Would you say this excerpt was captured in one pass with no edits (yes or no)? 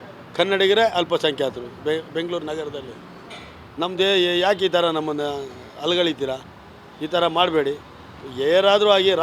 yes